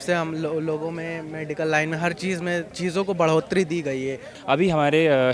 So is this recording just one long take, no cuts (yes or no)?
no